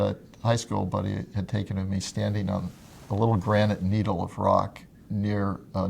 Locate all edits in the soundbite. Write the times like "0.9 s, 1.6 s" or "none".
4.9 s